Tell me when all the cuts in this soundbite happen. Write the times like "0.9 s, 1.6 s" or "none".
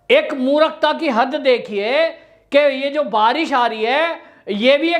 none